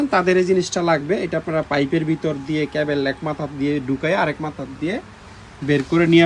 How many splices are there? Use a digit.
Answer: 0